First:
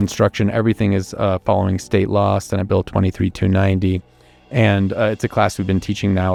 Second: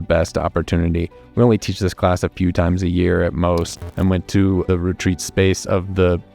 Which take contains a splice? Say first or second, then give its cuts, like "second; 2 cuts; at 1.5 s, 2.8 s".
second; 1 cut; at 3.8 s